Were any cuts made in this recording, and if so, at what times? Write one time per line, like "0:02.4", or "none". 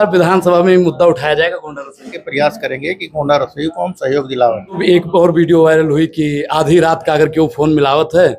0:02.2
0:04.8